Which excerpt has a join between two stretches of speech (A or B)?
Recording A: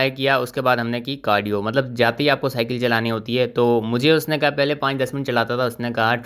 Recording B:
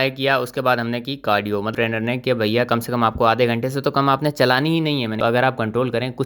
B